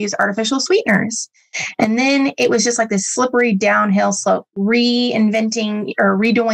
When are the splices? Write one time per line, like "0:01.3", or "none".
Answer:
none